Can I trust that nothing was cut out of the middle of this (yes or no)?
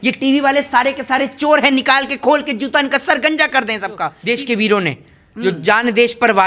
no